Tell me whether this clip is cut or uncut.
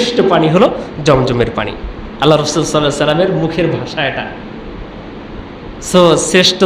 uncut